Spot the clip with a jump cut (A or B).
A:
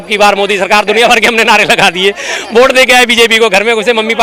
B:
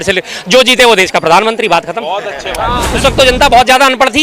B